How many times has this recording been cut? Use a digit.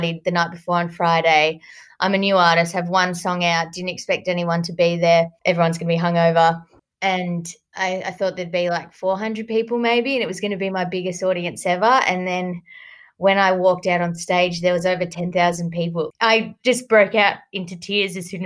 2